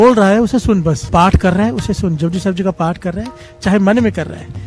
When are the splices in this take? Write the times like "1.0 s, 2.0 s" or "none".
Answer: 1.0 s